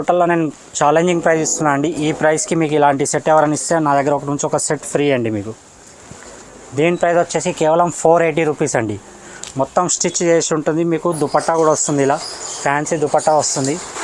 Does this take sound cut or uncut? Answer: uncut